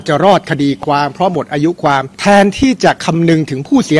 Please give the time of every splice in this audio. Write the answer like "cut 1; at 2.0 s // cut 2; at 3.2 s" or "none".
cut 1; at 2.1 s